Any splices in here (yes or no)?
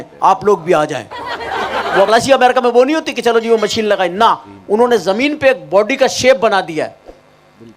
yes